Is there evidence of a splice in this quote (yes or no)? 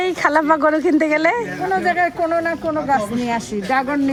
no